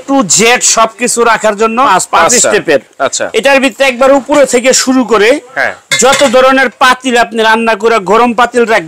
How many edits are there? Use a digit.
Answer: 1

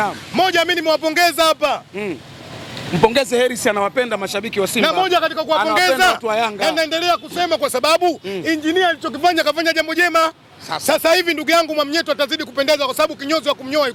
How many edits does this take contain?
0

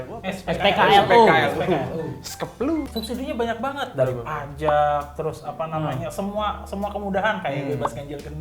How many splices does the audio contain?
1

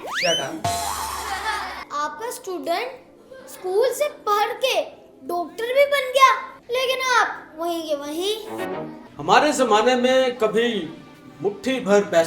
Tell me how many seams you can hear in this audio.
3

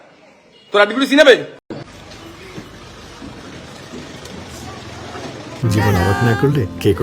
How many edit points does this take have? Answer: 1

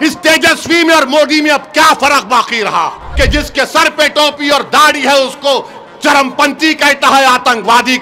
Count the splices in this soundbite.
1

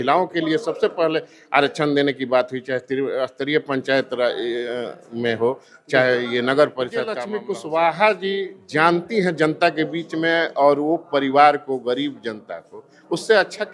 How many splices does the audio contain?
1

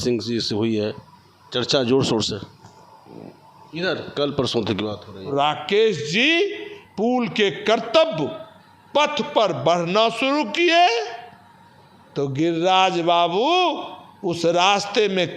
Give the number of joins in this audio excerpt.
1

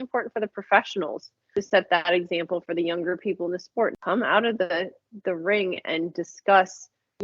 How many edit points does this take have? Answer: 1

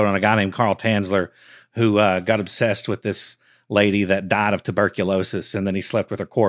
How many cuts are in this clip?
0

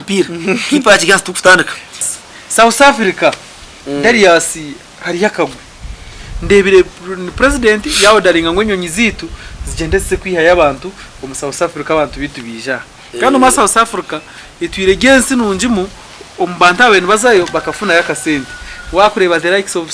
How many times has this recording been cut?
1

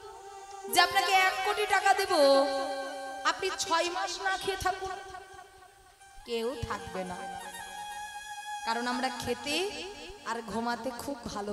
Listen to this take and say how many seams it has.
0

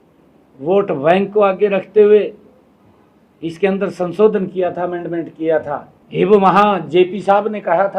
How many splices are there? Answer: 1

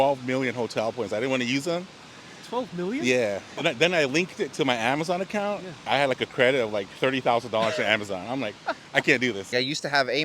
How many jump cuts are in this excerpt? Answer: 3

